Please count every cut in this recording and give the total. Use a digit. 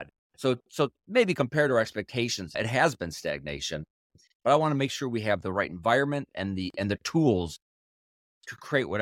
2